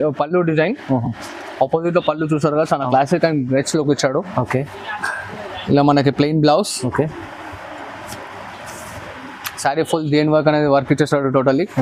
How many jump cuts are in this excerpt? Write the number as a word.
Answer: zero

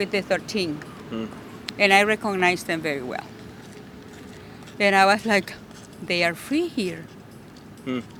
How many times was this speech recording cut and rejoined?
zero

